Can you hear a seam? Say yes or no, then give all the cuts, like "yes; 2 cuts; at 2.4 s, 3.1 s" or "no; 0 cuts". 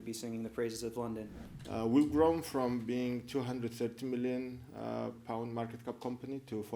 yes; 1 cut; at 1.3 s